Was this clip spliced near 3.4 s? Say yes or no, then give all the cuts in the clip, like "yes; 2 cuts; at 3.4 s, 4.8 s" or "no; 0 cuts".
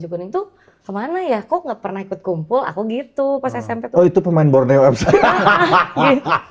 no; 0 cuts